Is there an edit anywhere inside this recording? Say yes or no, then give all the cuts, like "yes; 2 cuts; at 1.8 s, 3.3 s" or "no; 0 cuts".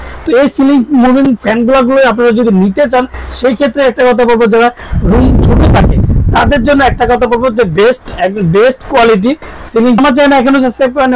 no; 0 cuts